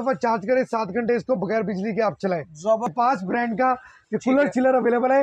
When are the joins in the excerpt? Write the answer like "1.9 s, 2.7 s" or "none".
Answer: 2.9 s